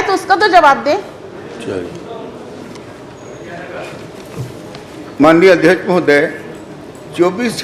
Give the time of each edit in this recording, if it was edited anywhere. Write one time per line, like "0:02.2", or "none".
none

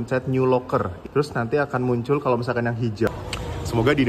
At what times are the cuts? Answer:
0:03.1

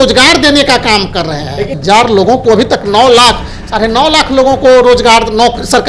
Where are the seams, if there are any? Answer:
0:01.7

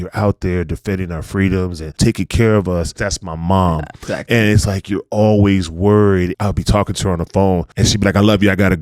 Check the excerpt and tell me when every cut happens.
0:01.9
0:03.0
0:06.3
0:07.7

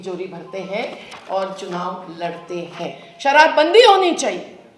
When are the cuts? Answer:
0:03.1

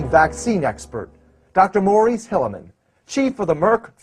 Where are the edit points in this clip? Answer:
none

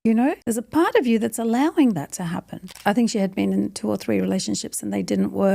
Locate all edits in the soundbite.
0:02.7

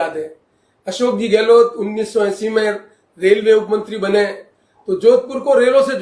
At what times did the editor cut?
none

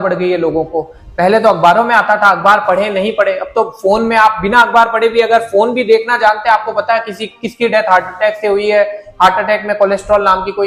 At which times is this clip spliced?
none

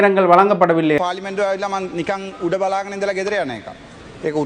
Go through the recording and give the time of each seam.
0:01.0

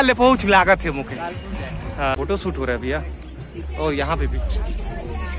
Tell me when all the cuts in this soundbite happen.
0:02.1

